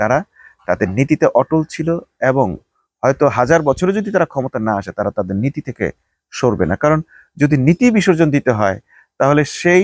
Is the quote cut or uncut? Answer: uncut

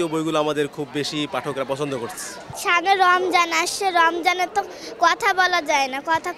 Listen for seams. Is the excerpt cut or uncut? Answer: cut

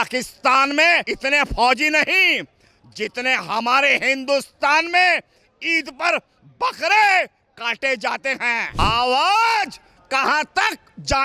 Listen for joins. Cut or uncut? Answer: cut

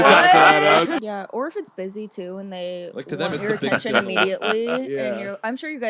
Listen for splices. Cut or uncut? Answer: cut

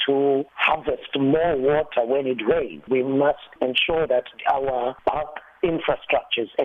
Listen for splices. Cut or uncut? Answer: cut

